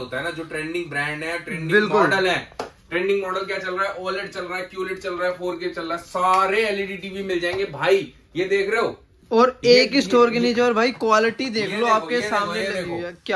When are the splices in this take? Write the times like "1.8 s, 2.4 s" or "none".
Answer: none